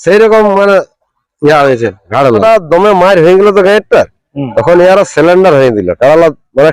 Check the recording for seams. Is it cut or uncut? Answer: cut